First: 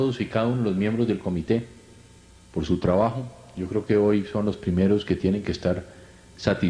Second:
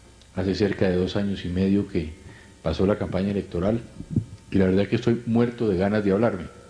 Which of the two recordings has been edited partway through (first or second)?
first